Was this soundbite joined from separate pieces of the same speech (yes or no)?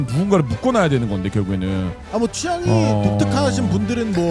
yes